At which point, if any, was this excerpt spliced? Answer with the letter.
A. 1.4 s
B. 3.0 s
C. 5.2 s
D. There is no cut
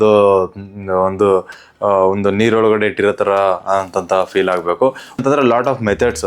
C